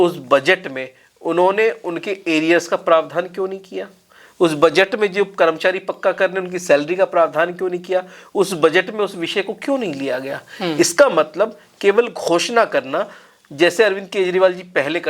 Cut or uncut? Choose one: uncut